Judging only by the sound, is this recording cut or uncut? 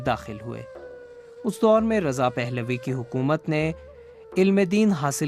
uncut